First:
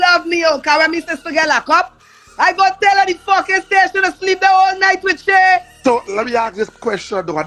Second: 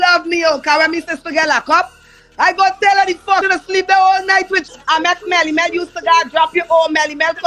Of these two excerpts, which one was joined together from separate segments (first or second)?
second